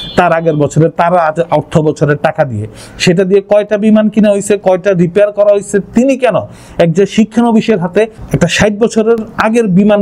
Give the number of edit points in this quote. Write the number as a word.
one